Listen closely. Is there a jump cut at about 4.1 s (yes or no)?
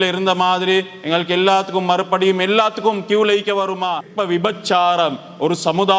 yes